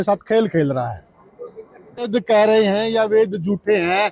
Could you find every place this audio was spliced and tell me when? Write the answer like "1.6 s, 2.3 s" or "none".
2.1 s